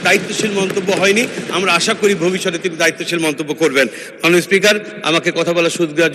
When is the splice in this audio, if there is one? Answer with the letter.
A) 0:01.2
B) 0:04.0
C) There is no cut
C